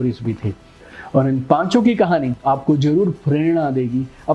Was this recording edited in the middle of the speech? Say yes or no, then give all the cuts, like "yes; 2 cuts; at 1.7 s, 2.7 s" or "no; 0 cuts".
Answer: yes; 1 cut; at 2.3 s